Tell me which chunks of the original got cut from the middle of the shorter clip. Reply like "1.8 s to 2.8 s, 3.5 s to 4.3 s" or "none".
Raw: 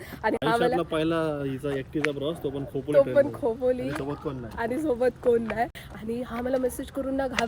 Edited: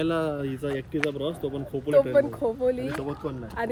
none